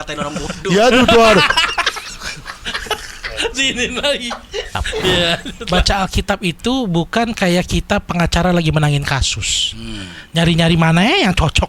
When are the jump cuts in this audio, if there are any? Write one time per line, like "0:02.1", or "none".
0:05.5